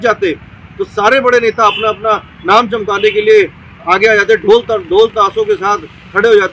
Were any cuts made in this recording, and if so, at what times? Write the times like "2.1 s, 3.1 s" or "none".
none